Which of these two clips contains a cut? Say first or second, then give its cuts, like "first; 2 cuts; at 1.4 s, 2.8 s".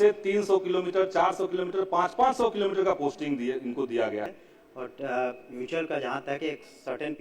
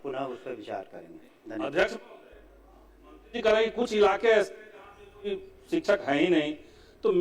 first; 1 cut; at 4.3 s